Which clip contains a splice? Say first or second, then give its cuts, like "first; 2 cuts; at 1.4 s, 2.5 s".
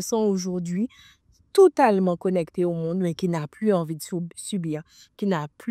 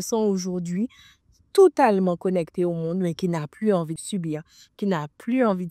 second; 1 cut; at 4.0 s